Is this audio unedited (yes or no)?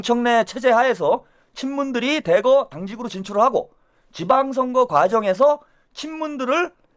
yes